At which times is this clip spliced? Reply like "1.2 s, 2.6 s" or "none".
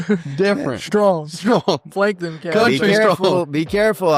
1.9 s

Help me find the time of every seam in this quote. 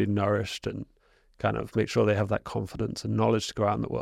none

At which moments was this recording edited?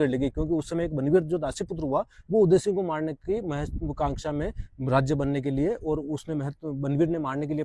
none

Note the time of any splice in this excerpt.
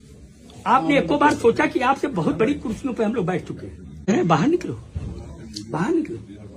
4.1 s

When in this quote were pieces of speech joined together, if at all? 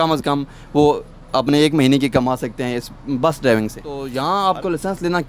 4.1 s

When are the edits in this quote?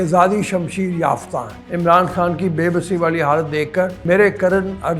1.6 s, 4.0 s

